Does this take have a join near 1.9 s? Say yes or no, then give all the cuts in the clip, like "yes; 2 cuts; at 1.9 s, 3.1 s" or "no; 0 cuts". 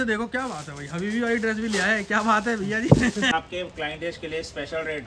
no; 1 cut; at 3.3 s